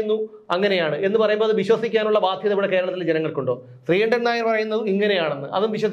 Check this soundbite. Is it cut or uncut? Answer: uncut